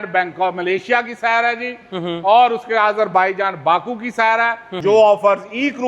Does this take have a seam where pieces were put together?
yes; 1 cut; at 4.7 s

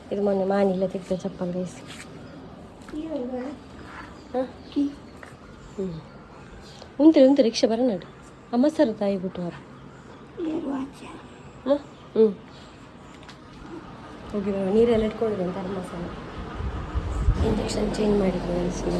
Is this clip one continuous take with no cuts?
yes; 0 cuts

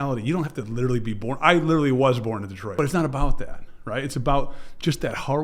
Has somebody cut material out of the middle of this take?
yes; 1 cut; at 2.6 s

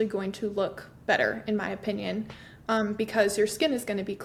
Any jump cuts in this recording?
no; 0 cuts

